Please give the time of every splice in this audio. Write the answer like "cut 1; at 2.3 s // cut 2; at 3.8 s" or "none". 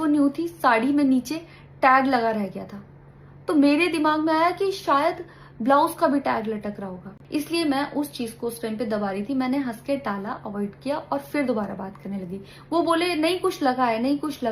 cut 1; at 7.1 s

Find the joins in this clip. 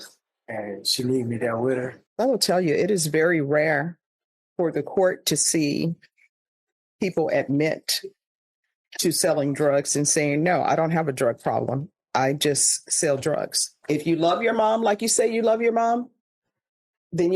cut 1; at 2.0 s // cut 2; at 13.8 s

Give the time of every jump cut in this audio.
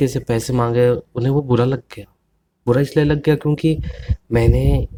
none

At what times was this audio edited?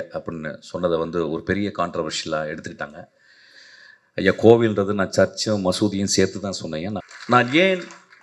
cut 1; at 7.0 s

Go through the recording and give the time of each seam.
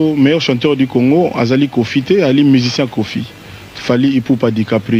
none

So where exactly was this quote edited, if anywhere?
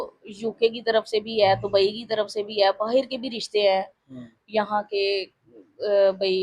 none

